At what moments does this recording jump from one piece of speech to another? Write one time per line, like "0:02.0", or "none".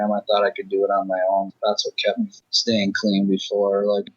0:02.5